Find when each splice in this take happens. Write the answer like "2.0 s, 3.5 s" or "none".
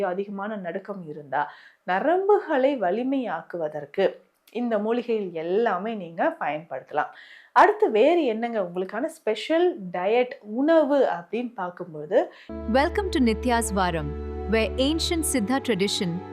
12.4 s